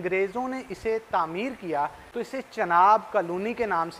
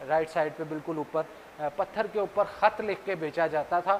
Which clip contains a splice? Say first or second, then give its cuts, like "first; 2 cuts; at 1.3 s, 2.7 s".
first; 1 cut; at 2.0 s